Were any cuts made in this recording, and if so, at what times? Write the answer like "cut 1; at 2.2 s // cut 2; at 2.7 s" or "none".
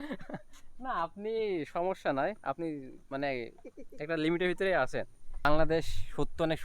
cut 1; at 5.4 s